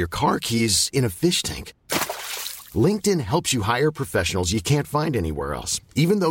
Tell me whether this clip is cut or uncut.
uncut